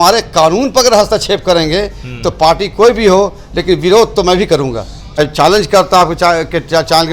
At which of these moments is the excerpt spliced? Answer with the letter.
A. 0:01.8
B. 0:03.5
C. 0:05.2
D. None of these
C